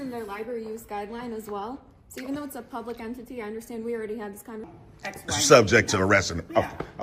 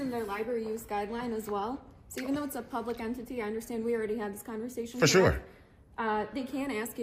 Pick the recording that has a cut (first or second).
first